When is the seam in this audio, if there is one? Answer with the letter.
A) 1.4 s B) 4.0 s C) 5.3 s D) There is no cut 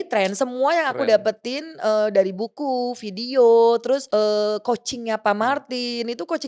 B